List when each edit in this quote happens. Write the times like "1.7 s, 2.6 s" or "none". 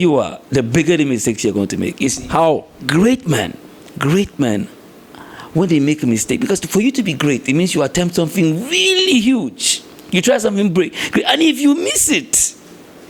none